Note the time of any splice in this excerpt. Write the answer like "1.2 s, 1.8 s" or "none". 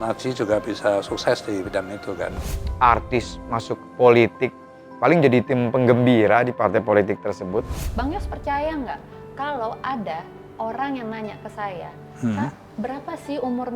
2.3 s, 7.8 s